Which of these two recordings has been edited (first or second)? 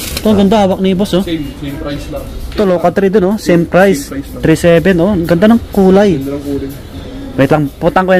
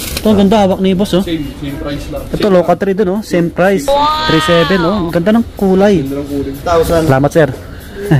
second